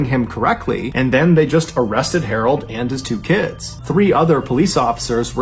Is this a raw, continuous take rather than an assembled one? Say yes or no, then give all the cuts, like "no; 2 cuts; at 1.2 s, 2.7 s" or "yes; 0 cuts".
yes; 0 cuts